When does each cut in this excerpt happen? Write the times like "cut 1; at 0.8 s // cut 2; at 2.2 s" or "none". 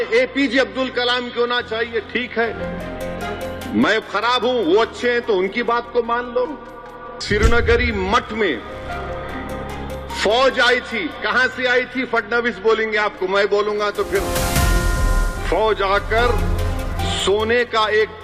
cut 1; at 7.1 s